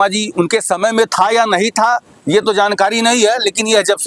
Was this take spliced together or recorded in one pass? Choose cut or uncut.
uncut